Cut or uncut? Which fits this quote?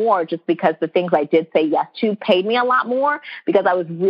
uncut